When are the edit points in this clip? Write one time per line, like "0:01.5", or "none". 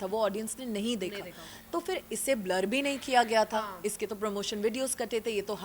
none